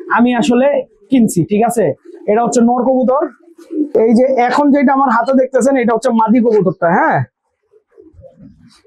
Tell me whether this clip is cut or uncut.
uncut